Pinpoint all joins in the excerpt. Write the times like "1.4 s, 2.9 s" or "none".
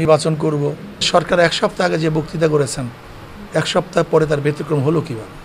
1.1 s